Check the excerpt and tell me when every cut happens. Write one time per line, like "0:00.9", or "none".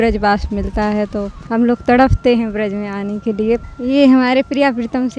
0:01.4
0:03.6